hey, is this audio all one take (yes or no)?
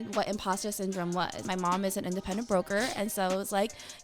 no